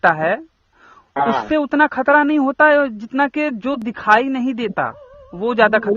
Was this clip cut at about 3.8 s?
yes; 1 cut; at 3.8 s

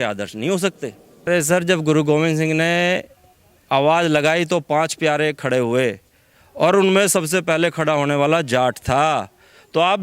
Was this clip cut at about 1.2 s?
yes; 1 cut; at 1.2 s

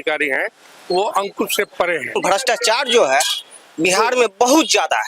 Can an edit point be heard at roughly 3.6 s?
no; 1 cut; at 2.2 s

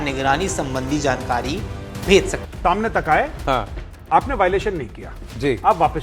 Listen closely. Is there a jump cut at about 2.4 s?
yes; 1 cut; at 2.4 s

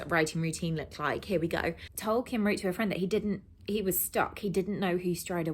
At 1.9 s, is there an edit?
yes; 1 cut; at 1.9 s

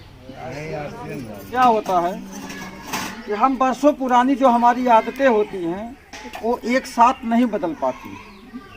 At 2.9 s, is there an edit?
no; 1 cut; at 1.5 s

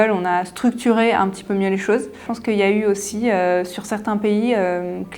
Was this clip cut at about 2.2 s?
yes; 1 cut; at 2.2 s

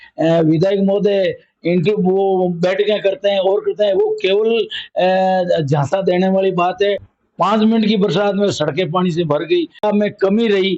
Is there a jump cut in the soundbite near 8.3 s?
no; 2 cuts; at 7.1 s, 9.8 s

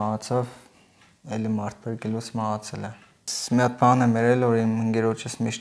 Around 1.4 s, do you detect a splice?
no; 1 cut; at 3.3 s

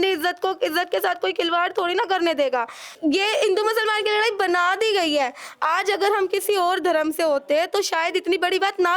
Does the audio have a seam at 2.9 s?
yes; 1 cut; at 2.9 s

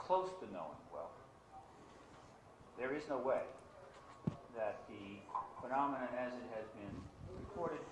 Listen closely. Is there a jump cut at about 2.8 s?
no; 1 cut; at 4.3 s

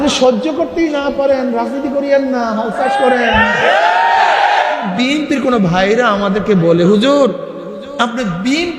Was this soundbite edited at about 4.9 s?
yes; 1 cut; at 4.9 s

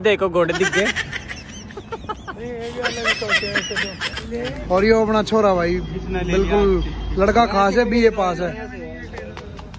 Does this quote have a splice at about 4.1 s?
yes; 1 cut; at 4.1 s

